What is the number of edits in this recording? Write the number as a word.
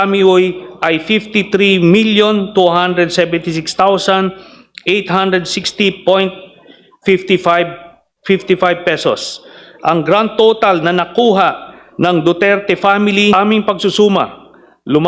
one